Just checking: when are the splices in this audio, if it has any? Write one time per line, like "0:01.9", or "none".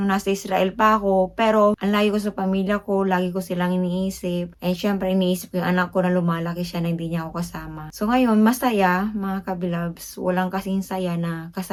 none